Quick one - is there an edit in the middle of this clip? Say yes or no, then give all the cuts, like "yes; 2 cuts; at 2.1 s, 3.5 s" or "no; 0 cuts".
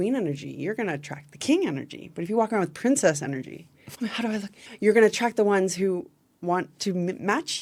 no; 0 cuts